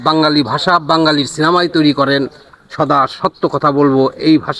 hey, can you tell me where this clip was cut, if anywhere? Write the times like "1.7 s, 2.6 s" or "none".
none